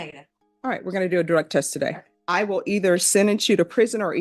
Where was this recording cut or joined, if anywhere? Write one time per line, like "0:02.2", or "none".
0:02.1